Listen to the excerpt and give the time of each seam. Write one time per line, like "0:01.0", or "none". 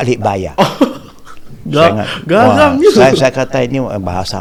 none